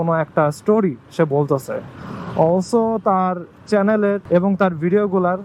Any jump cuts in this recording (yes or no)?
yes